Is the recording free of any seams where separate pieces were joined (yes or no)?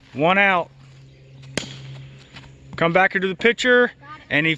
yes